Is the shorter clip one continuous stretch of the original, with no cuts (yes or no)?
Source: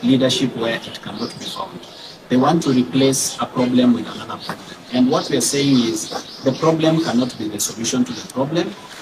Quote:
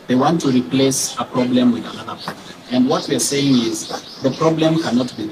yes